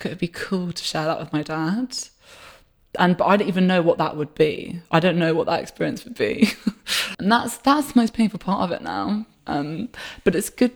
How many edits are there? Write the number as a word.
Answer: one